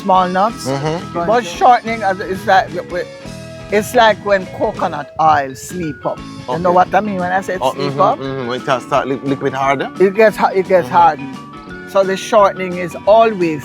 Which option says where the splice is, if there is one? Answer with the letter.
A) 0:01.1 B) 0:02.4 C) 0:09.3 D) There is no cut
A